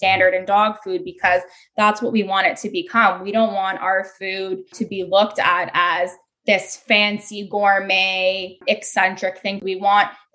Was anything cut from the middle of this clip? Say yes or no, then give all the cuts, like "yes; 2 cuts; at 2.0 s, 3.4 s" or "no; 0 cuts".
yes; 3 cuts; at 4.7 s, 8.6 s, 9.6 s